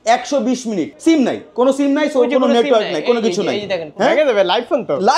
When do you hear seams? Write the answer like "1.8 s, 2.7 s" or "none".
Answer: 0.9 s, 3.9 s